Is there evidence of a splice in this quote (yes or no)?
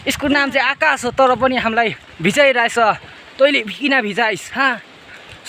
no